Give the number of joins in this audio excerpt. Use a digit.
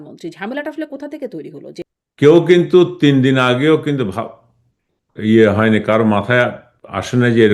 1